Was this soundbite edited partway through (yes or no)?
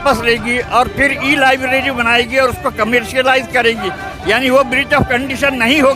no